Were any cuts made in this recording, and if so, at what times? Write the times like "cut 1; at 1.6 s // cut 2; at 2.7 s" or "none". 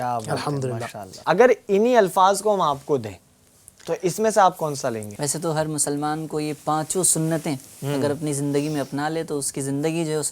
cut 1; at 1.1 s // cut 2; at 5.1 s